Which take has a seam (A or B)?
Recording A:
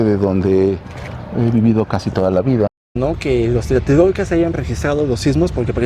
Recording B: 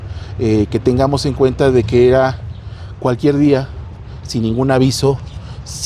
A